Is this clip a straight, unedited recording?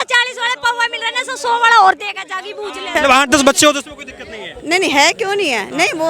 no; 1 cut; at 2.9 s

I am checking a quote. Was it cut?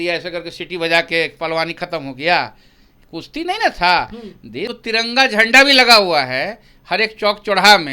yes; 1 cut; at 4.7 s

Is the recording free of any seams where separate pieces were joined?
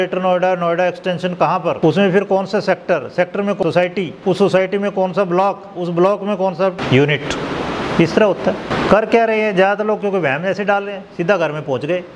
no; 4 cuts; at 1.8 s, 3.6 s, 6.8 s, 8.7 s

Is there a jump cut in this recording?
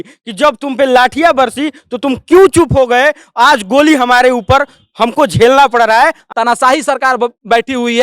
yes; 1 cut; at 6.2 s

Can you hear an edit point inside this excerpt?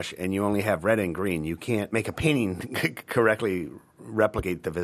no; 0 cuts

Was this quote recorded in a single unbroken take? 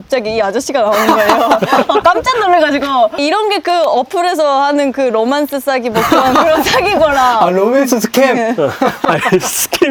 yes; 0 cuts

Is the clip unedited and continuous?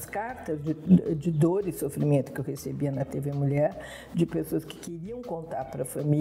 yes; 0 cuts

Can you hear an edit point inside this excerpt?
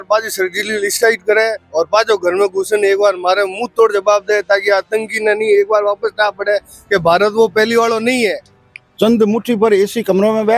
yes; 1 cut; at 8.5 s

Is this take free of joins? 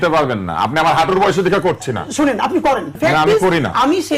no; 1 cut; at 2.9 s

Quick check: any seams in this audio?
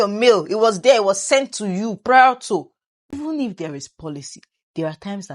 yes; 1 cut; at 3.1 s

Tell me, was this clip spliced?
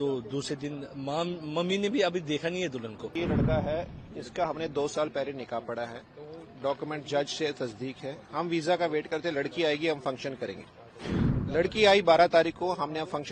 yes; 1 cut; at 3.0 s

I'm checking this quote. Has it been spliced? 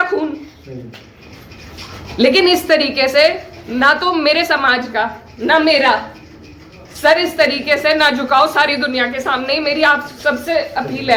no; 0 cuts

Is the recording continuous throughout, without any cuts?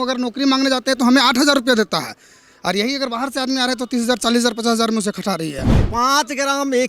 no; 1 cut; at 5.8 s

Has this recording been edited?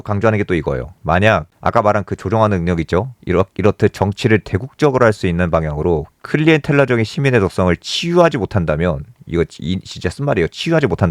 no; 0 cuts

